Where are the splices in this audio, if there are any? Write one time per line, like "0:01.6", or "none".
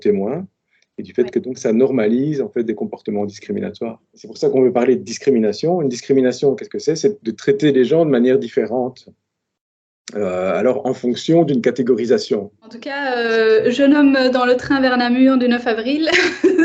0:04.2
0:13.0

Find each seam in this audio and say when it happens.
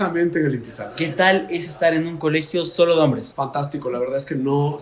0:03.3

